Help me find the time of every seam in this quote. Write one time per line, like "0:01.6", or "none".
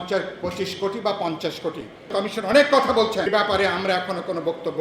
0:02.1
0:03.3